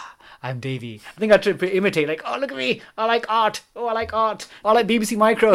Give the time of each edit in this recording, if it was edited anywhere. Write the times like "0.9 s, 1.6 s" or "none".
1.1 s, 4.5 s